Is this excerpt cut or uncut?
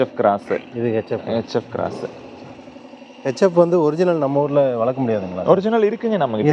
uncut